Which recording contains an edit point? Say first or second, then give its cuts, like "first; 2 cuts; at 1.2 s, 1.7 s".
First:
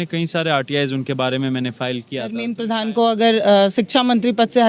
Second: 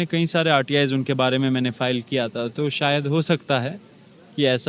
first; 1 cut; at 2.5 s